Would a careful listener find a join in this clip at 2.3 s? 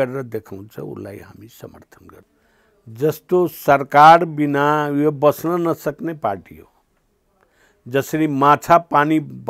yes; 1 cut; at 2.3 s

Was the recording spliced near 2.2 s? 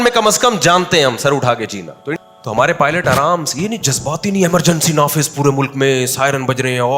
yes; 1 cut; at 2.2 s

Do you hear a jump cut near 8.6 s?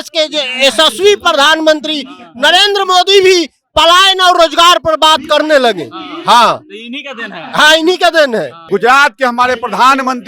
yes; 1 cut; at 8.6 s

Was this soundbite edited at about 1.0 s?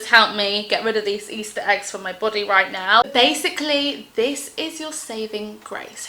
no; 1 cut; at 3.1 s

